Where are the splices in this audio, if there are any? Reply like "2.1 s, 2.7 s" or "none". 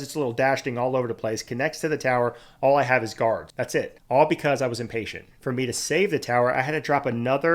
5.2 s